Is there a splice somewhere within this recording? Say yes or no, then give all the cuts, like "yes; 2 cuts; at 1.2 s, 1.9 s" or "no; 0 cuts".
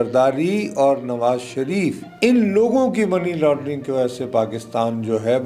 yes; 1 cut; at 2.0 s